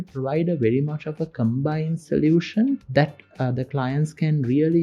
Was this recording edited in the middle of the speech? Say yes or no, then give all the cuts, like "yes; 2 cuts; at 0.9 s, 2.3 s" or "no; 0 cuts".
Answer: yes; 1 cut; at 2.8 s